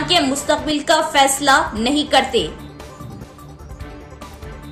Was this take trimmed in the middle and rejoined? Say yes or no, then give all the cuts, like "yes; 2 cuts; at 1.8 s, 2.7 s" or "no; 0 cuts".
no; 0 cuts